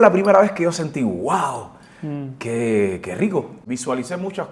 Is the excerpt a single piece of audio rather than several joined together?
no; 1 cut; at 3.5 s

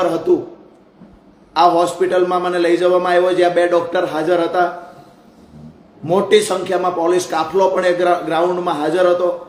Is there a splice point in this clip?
no; 0 cuts

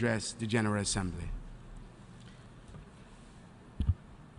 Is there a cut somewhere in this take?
no; 0 cuts

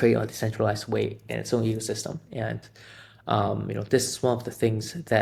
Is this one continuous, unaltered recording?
yes; 0 cuts

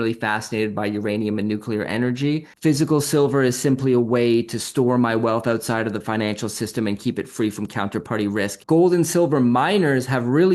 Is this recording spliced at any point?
yes; 2 cuts; at 2.5 s, 8.6 s

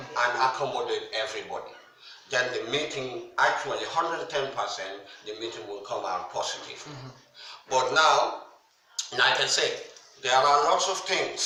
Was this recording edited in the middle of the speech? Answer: no; 0 cuts

